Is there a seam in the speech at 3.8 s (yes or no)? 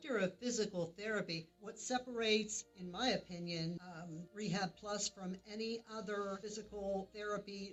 no